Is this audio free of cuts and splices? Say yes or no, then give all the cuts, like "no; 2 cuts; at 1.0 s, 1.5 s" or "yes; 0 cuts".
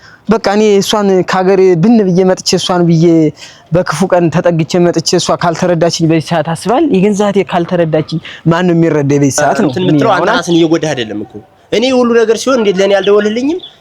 no; 1 cut; at 9.8 s